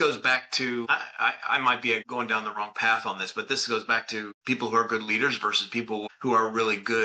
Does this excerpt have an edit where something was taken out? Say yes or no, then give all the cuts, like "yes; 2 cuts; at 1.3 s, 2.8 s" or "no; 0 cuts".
yes; 4 cuts; at 0.9 s, 2.1 s, 4.3 s, 6.0 s